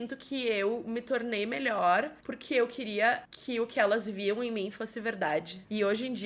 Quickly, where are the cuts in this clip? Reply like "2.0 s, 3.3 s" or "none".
none